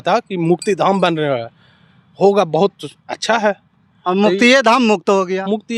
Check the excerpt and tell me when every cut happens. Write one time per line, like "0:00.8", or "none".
none